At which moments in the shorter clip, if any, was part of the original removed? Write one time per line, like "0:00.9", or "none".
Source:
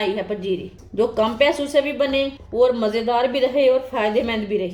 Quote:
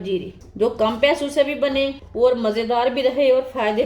none

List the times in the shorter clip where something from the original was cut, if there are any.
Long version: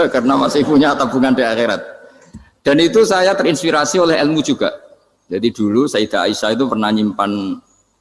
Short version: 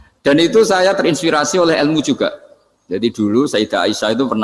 none

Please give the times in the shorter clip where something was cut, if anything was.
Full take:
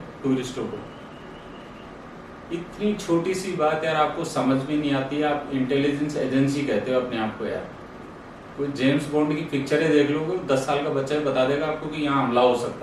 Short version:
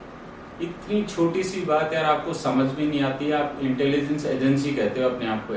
none

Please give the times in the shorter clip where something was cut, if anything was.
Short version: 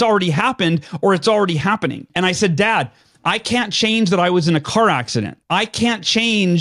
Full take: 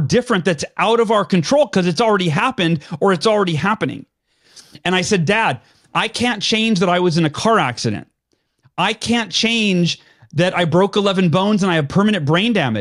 0:02.0
0:05.4

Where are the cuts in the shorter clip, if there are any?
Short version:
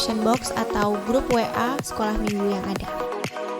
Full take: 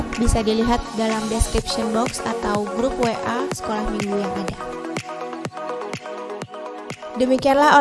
0:02.5

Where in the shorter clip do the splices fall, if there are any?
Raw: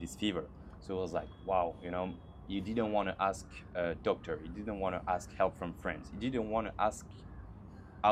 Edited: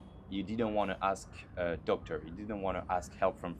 none

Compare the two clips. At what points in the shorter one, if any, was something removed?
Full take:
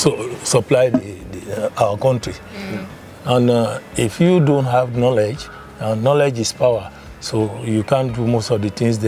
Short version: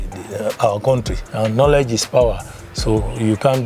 0:01.2

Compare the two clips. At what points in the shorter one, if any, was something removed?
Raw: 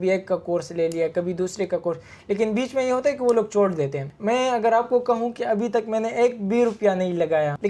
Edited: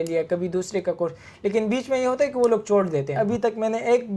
0:03.1

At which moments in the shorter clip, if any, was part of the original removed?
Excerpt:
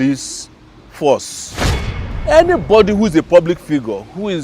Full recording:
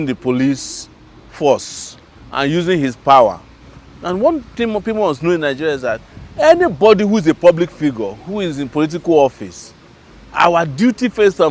0:01.9

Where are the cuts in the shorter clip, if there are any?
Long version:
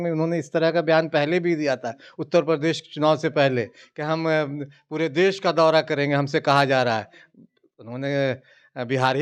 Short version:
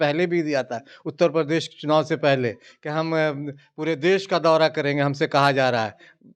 none

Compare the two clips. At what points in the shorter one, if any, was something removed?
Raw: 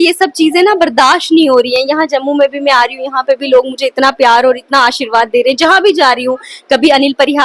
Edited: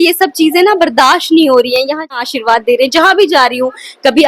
0:02.1

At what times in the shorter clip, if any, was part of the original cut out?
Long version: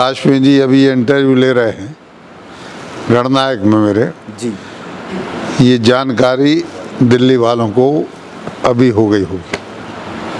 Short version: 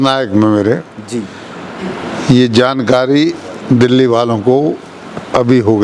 none

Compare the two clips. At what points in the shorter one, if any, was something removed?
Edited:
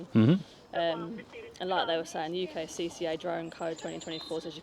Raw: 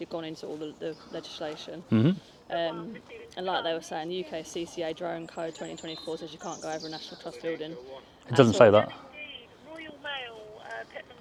none

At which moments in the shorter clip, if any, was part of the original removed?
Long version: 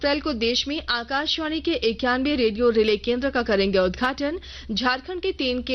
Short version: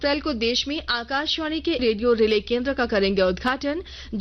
0:01.8

